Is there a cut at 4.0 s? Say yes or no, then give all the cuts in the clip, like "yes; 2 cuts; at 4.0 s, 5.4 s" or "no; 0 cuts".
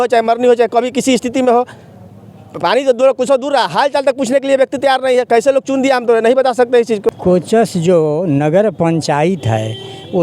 no; 1 cut; at 7.2 s